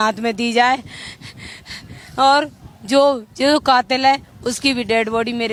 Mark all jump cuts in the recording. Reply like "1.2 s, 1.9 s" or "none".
none